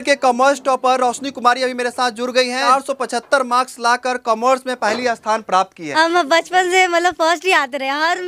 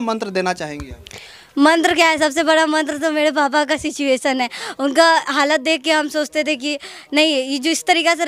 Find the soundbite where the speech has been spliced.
first; 2 cuts; at 2.7 s, 5.8 s

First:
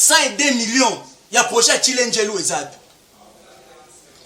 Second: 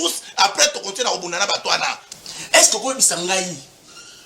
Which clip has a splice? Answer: second; 1 cut; at 2.0 s

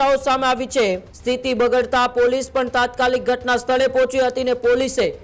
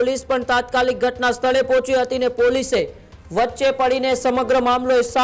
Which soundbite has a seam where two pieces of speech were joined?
first; 1 cut; at 1.1 s

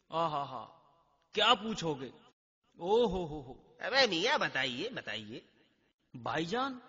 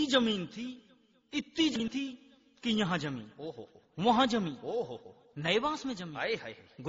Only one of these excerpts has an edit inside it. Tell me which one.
second; 1 cut; at 1.8 s

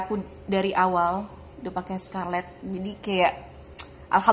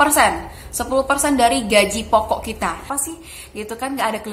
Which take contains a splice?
second; 1 cut; at 2.9 s

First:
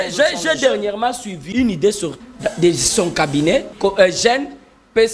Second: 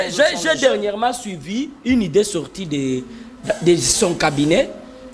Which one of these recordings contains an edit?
first; 3 cuts; at 1.4 s, 2.2 s, 3.7 s

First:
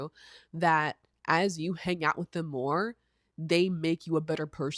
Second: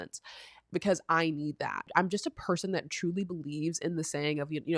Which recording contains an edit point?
second; 1 cut; at 1.9 s

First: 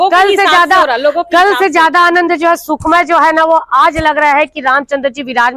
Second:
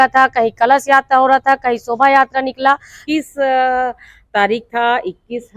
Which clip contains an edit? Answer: second; 1 cut; at 2.9 s

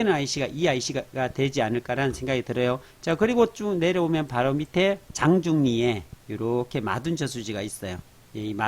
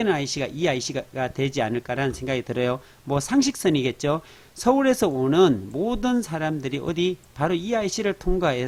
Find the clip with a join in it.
first; 1 cut; at 2.9 s

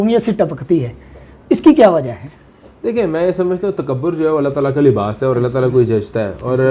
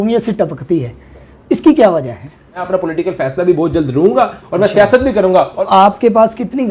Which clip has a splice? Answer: second; 2 cuts; at 2.6 s, 5.6 s

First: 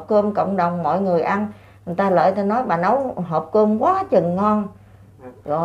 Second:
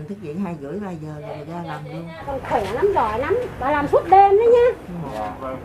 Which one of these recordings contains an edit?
second; 1 cut; at 2.2 s

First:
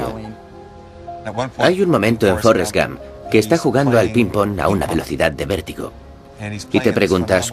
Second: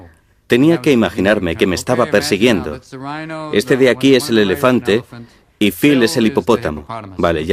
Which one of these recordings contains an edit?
second; 1 cut; at 0.9 s

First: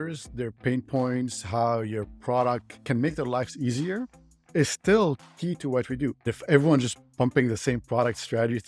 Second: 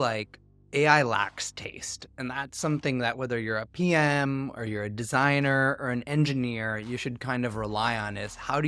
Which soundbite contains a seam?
first; 2 cuts; at 2.7 s, 6.3 s

